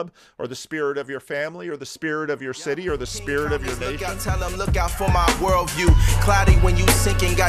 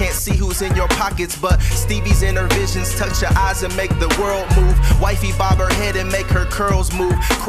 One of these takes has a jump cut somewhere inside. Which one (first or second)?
first